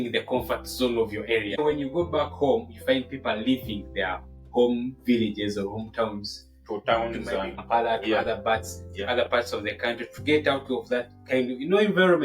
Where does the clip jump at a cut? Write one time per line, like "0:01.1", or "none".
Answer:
0:01.5
0:07.6

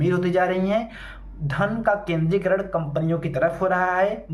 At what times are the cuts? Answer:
none

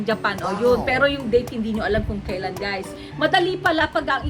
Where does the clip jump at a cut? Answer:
0:03.0

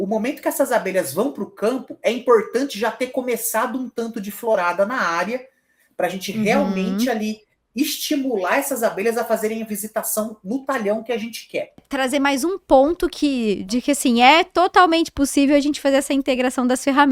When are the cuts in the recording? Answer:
0:11.8

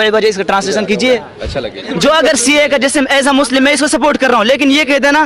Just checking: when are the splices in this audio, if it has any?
0:01.9

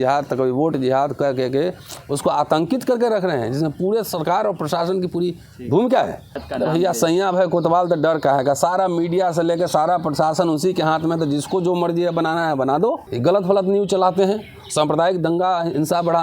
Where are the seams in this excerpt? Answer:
0:06.4
0:13.1

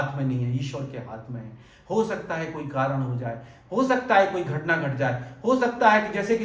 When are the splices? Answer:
none

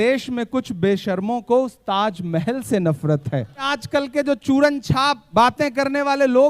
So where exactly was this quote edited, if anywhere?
0:03.8
0:05.2

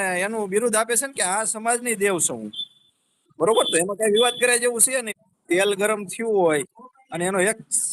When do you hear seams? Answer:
0:05.1

